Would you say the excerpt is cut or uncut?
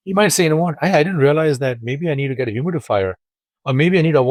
uncut